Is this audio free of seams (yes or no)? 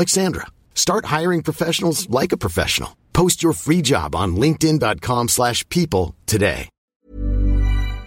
no